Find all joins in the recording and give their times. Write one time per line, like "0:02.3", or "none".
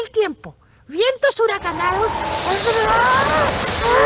none